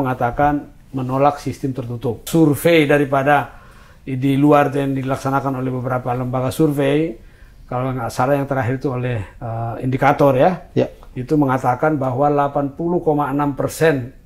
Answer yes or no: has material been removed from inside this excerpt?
yes